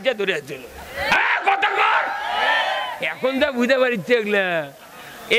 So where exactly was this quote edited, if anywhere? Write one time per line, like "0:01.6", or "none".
0:03.0